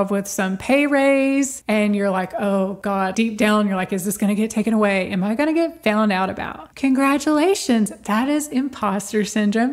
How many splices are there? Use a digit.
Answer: 2